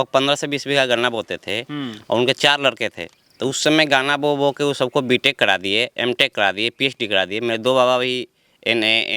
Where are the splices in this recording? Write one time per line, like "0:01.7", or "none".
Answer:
none